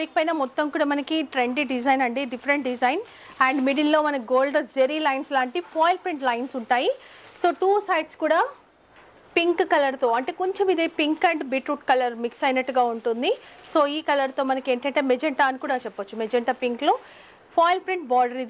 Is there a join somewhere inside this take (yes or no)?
no